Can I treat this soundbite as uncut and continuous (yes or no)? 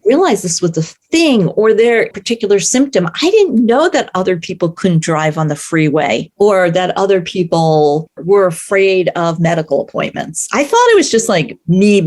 no